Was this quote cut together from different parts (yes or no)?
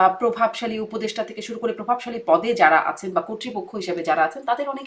no